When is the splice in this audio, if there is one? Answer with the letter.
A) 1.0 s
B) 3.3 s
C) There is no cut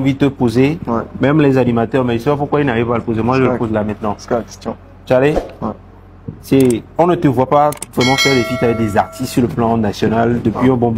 C